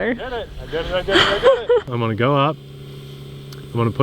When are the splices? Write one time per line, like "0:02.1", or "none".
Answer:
0:01.9